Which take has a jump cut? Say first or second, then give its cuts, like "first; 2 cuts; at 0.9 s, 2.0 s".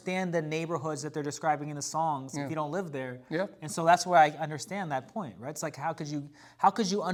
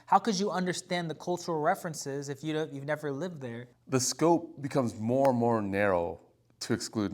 second; 1 cut; at 3.7 s